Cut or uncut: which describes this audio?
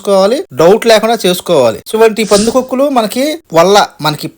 cut